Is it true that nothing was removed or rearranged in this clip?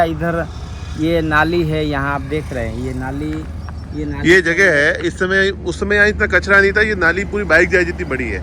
yes; 0 cuts

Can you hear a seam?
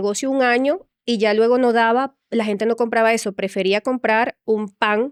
no; 0 cuts

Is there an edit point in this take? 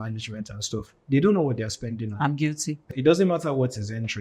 yes; 1 cut; at 2.9 s

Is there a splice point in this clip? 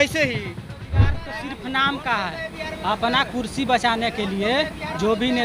yes; 1 cut; at 1.2 s

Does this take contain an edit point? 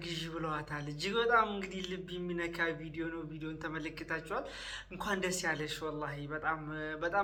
no; 0 cuts

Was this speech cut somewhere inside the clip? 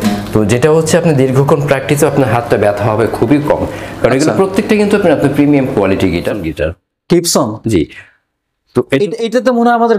yes; 1 cut; at 6.4 s

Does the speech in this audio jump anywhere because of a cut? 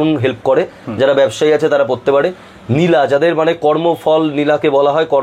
no; 0 cuts

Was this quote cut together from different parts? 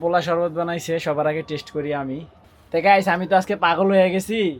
yes; 1 cut; at 2.4 s

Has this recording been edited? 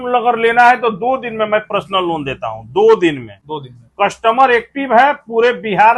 no; 0 cuts

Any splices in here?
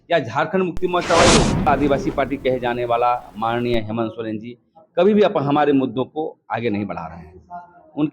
yes; 1 cut; at 1.7 s

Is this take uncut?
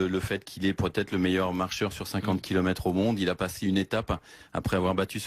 yes; 0 cuts

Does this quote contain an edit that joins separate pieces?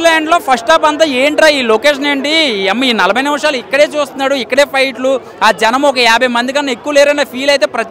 no; 0 cuts

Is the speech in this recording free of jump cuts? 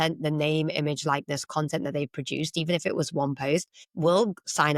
no; 1 cut; at 3.8 s

